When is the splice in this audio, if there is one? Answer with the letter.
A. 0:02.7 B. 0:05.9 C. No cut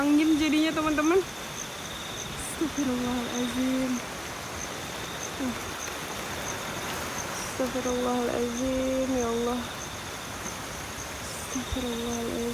C